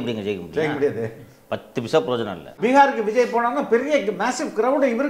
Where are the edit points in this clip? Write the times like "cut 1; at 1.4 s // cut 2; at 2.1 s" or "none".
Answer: cut 1; at 2.6 s